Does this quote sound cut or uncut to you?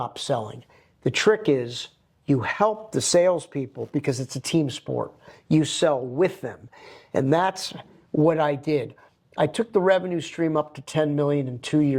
uncut